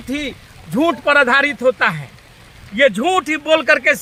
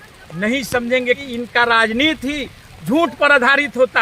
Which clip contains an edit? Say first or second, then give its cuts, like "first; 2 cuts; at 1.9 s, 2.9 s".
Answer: second; 1 cut; at 1.2 s